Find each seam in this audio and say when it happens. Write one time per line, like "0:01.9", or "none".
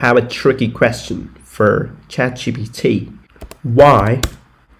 none